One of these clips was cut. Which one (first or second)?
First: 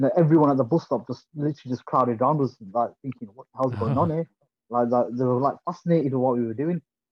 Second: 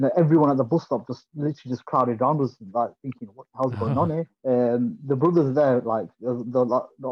second